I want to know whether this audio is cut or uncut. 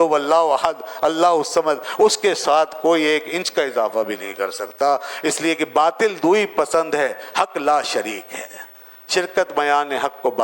uncut